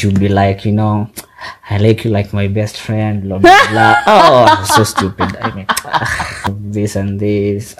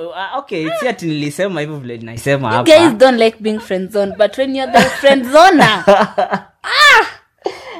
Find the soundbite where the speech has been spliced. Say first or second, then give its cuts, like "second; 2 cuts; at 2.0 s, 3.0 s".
first; 1 cut; at 6.6 s